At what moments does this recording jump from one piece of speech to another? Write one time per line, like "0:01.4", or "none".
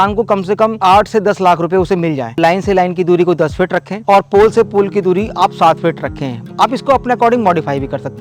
0:00.8
0:02.3